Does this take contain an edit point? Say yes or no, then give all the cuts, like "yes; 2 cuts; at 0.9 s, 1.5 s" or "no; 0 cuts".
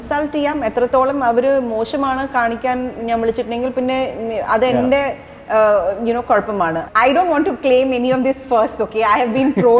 yes; 1 cut; at 6.8 s